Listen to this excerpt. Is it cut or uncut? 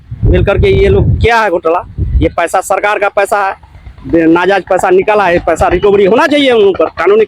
uncut